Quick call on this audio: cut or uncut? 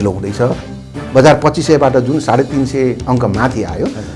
cut